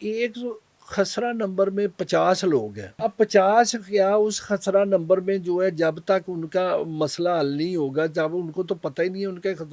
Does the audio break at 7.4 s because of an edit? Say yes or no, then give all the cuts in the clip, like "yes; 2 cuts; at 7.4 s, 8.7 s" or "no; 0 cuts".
no; 1 cut; at 2.9 s